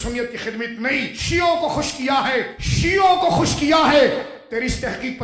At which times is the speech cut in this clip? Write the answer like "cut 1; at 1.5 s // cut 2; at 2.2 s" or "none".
cut 1; at 1.2 s // cut 2; at 2.6 s

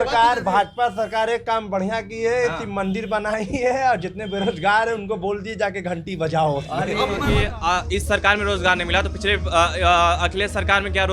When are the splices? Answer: cut 1; at 7.2 s

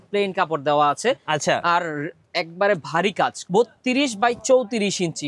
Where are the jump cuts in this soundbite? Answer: cut 1; at 3.4 s

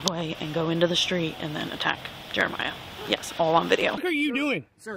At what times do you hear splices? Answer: cut 1; at 4.0 s

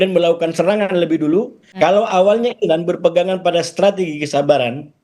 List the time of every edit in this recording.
cut 1; at 1.6 s

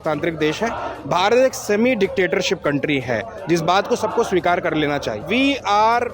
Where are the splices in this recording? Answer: cut 1; at 5.2 s

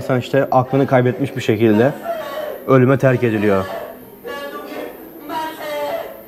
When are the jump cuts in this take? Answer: none

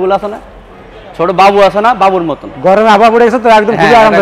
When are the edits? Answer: none

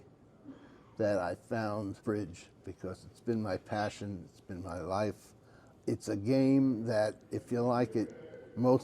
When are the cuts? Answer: cut 1; at 2.0 s

